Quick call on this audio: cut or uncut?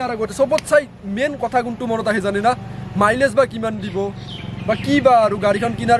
uncut